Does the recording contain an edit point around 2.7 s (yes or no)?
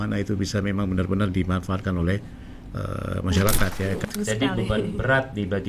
no